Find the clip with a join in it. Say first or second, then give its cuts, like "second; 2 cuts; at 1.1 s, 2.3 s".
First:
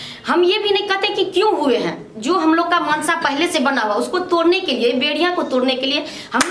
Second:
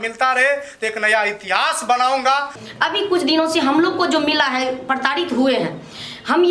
second; 1 cut; at 2.6 s